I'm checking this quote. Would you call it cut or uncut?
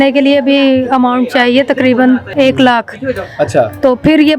cut